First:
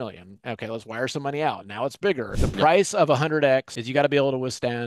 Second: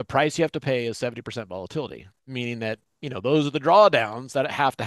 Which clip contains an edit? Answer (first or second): first